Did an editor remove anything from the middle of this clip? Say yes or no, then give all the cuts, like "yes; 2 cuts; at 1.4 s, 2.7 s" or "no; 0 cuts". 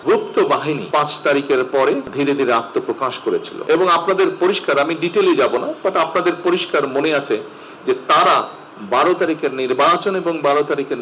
yes; 3 cuts; at 0.8 s, 2.1 s, 3.5 s